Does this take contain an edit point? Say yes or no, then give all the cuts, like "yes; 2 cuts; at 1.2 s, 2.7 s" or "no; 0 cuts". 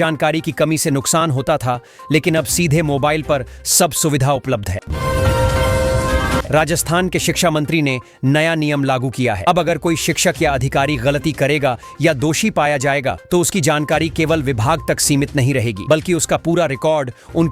yes; 2 cuts; at 4.9 s, 6.4 s